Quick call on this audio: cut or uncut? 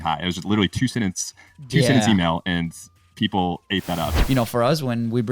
cut